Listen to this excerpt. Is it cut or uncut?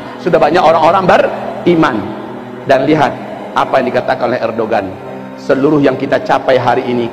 uncut